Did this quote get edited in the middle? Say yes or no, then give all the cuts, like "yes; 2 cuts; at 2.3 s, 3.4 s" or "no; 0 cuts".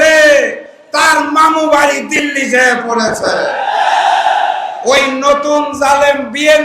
yes; 1 cut; at 4.7 s